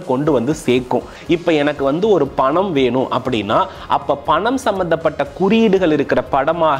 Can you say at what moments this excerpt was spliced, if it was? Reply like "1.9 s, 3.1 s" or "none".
1.1 s